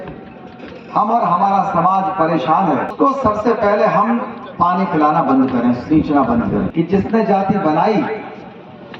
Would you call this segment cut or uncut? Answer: cut